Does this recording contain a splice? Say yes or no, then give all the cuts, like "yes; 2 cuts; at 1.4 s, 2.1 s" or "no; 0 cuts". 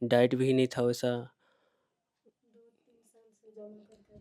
no; 0 cuts